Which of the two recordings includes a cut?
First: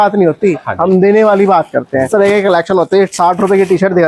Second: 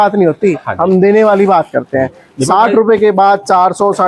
first; 1 cut; at 2.1 s

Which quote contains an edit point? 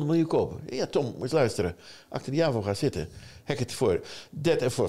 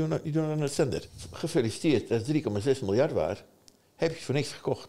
second; 1 cut; at 1.0 s

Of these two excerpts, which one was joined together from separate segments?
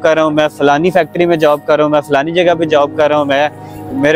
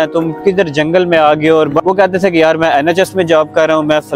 second; 1 cut; at 1.8 s

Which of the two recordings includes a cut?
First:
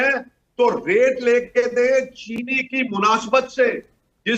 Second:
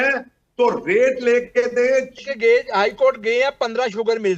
second; 1 cut; at 2.3 s

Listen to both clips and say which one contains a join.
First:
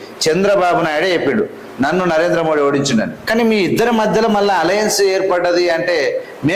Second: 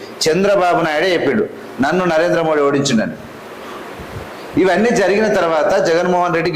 first; 1 cut; at 3.2 s

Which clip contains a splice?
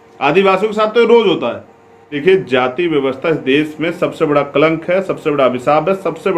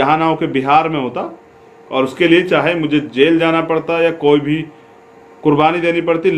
first; 1 cut; at 2.2 s

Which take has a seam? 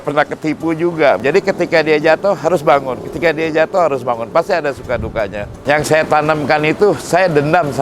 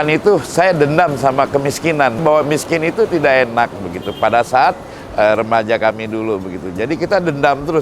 first; 2 cuts; at 1.2 s, 5.6 s

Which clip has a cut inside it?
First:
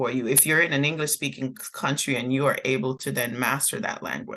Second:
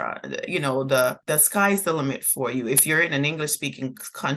second; 1 cut; at 1.2 s

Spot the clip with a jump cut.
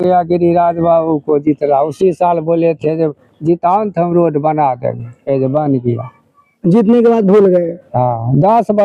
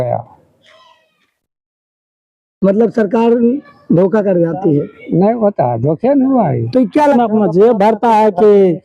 second; 1 cut; at 7.1 s

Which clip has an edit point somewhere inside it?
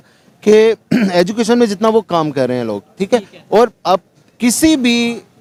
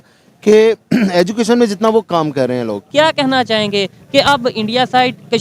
second; 1 cut; at 2.8 s

